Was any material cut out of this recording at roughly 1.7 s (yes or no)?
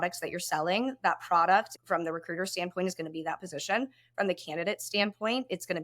yes